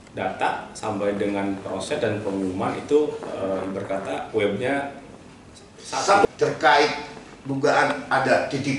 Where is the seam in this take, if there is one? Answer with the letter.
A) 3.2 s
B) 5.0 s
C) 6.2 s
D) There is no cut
C